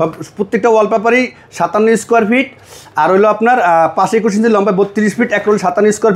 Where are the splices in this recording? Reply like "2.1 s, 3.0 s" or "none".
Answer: none